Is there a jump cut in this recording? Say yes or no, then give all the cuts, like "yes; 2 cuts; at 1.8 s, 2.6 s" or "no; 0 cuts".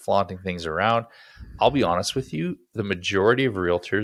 no; 0 cuts